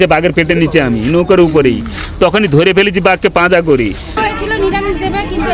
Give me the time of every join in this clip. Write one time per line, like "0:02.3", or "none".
0:04.1